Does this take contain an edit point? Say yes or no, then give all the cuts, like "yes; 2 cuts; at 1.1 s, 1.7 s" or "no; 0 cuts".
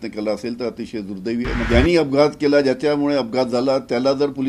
yes; 1 cut; at 1.7 s